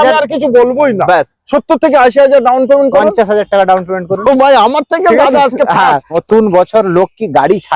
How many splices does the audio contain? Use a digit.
1